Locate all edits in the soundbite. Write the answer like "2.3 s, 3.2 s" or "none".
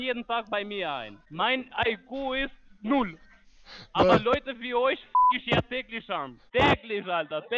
1.2 s, 6.5 s

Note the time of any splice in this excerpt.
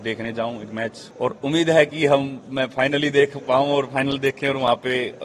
1.0 s

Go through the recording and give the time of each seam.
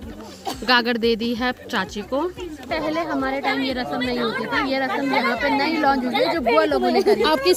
none

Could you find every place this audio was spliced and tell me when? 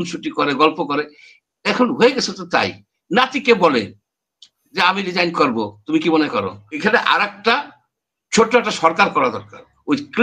6.6 s

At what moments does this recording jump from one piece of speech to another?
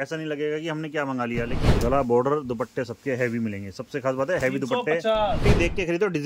1.7 s, 5.4 s

